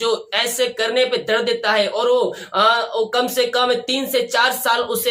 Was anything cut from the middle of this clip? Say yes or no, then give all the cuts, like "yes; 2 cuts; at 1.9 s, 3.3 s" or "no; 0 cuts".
no; 0 cuts